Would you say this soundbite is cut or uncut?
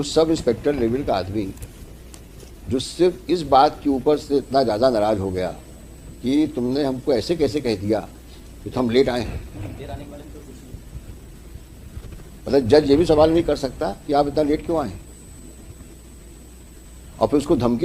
uncut